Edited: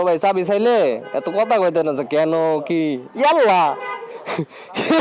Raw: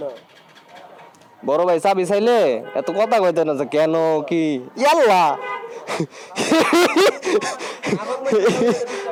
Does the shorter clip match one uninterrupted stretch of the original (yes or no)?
yes